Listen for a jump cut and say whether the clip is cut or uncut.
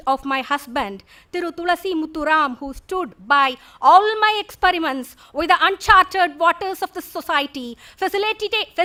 uncut